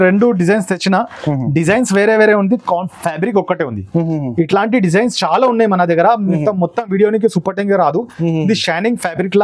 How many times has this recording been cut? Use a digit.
0